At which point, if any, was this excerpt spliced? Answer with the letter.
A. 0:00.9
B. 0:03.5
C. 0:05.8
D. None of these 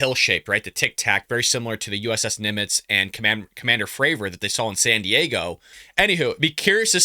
C